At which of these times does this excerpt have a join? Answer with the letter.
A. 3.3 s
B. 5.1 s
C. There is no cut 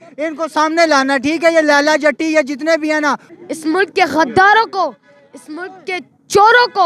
A